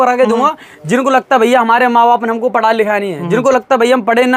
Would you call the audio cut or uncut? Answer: uncut